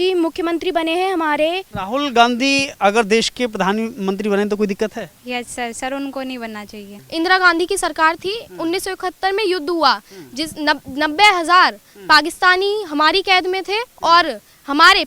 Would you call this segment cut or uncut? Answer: cut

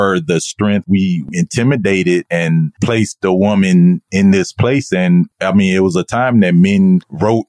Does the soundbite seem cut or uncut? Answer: cut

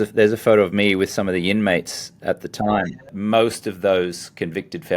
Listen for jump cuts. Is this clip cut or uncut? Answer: cut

